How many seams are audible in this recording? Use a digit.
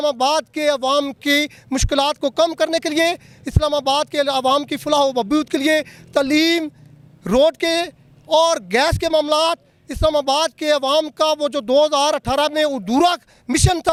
0